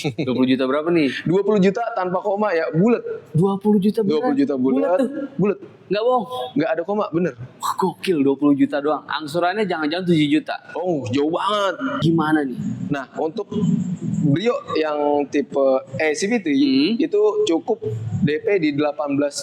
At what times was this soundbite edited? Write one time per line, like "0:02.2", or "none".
0:12.0